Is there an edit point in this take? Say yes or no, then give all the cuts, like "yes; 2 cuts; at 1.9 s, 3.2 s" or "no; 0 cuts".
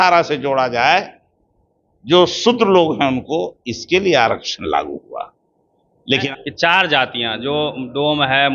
yes; 1 cut; at 6.3 s